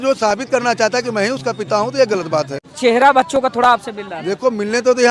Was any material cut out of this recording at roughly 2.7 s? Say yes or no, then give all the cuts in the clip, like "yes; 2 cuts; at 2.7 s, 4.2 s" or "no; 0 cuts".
yes; 1 cut; at 2.7 s